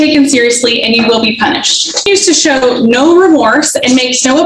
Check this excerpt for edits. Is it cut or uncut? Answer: cut